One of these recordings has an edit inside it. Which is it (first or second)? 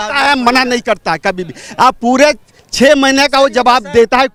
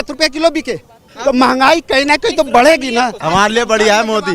second